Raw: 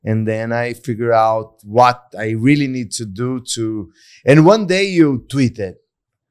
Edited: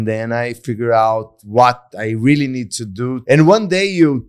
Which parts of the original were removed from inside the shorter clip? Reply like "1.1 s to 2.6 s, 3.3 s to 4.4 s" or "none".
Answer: 3.4 s to 4.2 s